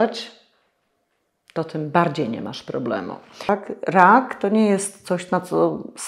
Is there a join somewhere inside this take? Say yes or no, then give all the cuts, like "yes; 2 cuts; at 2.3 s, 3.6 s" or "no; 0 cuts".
yes; 1 cut; at 3.5 s